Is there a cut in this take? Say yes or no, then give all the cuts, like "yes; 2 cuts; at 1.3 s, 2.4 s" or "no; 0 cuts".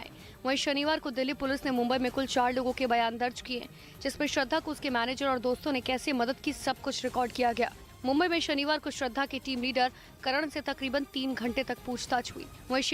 no; 0 cuts